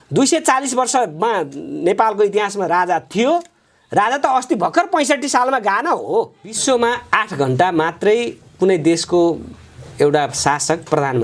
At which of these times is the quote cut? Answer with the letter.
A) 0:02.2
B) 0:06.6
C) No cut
B